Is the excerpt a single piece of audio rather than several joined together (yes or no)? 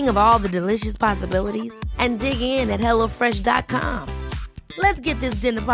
yes